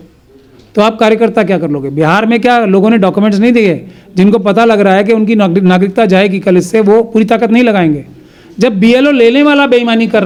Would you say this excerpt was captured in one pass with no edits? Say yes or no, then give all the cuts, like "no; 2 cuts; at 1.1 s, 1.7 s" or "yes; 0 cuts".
yes; 0 cuts